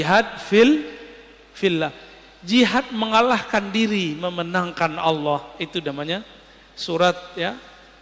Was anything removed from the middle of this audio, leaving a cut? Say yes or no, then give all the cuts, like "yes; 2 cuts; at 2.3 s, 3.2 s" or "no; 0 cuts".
no; 0 cuts